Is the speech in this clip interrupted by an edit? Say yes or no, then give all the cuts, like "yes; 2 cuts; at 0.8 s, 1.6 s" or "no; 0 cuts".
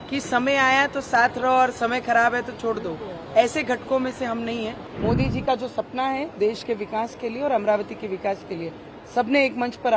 yes; 1 cut; at 4.8 s